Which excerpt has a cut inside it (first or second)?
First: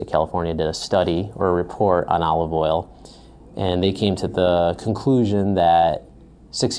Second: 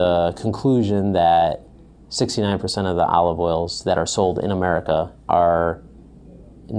second